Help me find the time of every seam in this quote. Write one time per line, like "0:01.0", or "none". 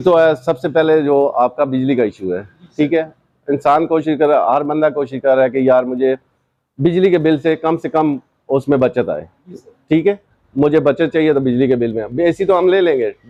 none